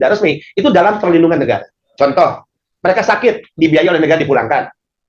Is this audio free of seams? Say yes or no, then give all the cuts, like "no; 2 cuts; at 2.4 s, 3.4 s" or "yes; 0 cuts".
no; 1 cut; at 1.8 s